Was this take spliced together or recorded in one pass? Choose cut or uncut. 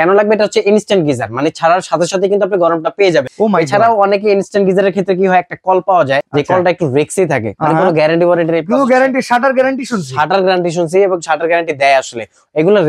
uncut